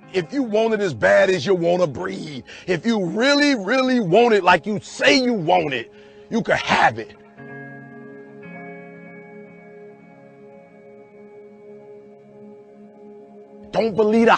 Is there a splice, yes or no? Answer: no